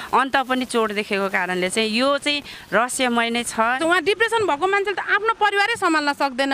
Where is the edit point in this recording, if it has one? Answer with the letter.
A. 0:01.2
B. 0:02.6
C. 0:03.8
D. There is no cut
C